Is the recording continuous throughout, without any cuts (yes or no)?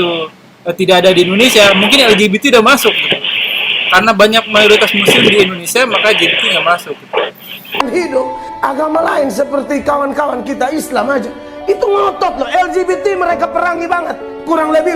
no